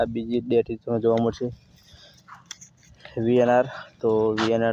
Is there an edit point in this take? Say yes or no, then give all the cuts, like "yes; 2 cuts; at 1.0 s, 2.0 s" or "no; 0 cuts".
no; 0 cuts